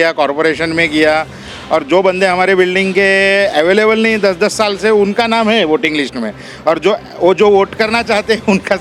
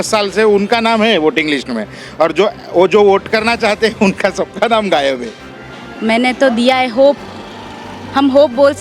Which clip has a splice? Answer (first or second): second